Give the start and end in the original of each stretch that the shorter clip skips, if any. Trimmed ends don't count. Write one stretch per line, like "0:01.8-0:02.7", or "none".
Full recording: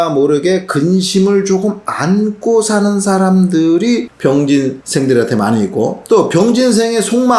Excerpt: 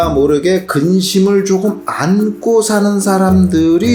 none